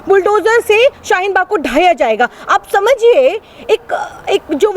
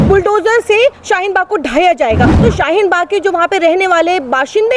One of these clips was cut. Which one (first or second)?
second